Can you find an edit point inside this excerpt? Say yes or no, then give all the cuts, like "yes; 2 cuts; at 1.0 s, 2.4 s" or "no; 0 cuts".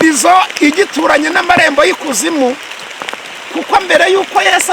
no; 0 cuts